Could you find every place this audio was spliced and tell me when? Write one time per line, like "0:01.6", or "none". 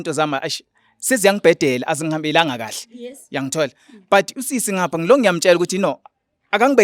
none